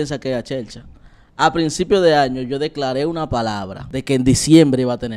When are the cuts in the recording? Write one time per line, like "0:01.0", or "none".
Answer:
0:03.8